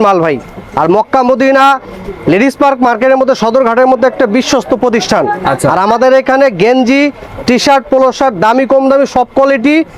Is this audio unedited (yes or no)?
yes